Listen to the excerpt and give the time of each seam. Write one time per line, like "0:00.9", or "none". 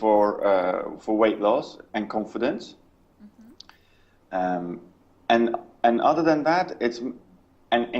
0:02.6